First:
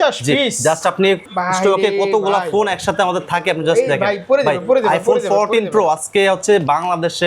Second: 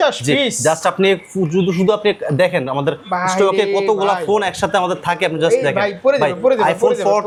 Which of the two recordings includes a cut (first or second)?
first